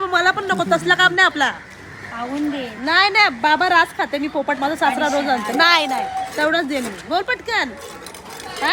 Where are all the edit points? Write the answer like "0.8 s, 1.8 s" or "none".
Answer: none